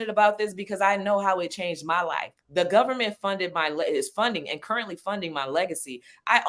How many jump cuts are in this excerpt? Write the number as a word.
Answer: one